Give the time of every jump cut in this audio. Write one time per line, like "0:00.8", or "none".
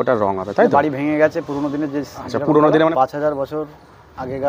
0:02.9